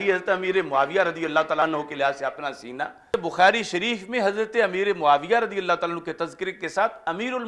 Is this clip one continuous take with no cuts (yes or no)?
no